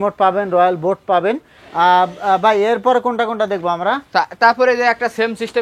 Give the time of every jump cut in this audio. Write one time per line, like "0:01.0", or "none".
none